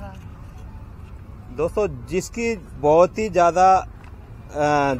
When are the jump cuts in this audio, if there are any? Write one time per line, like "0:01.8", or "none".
none